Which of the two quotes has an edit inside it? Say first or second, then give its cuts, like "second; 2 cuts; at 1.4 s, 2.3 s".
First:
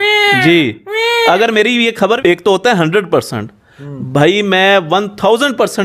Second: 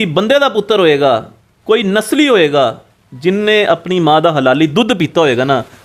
first; 1 cut; at 2.2 s